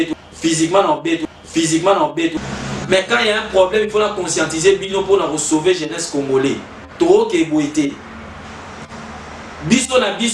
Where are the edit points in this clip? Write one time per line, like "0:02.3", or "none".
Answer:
0:02.4